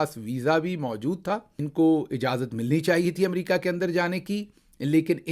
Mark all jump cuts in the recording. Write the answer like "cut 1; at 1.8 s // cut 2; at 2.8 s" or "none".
cut 1; at 1.6 s